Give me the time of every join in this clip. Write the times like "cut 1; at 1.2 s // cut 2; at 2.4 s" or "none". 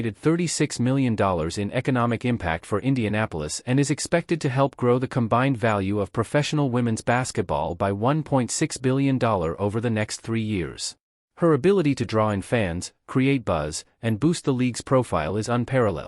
cut 1; at 12.4 s